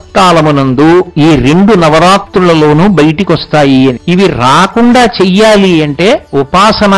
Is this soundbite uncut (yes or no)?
no